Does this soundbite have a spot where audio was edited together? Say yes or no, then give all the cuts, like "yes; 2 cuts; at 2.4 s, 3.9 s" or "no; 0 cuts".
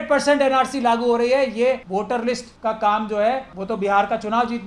yes; 2 cuts; at 2.1 s, 3.5 s